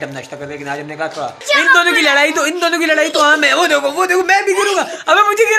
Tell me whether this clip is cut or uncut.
cut